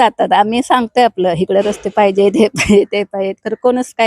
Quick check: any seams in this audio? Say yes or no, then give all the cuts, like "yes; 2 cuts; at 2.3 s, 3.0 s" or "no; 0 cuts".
no; 0 cuts